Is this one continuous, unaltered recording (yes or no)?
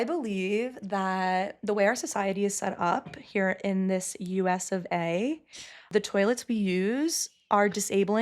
no